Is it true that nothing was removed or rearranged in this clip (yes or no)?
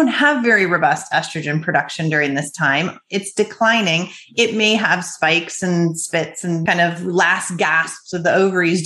no